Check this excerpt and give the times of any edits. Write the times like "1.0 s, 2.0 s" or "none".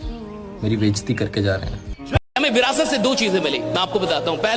2.3 s